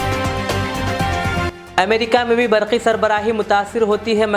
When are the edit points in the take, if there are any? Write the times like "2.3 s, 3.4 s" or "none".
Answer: 1.5 s